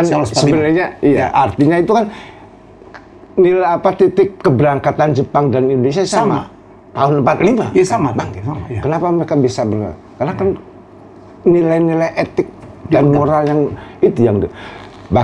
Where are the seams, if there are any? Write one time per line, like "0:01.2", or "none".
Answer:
none